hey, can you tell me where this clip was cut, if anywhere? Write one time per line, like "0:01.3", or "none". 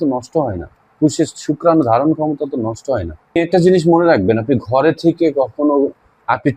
0:03.4